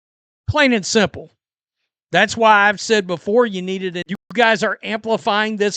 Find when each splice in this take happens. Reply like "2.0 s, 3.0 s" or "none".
4.1 s